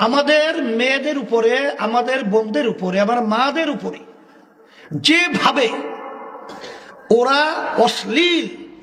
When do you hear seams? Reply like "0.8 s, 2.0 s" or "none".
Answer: none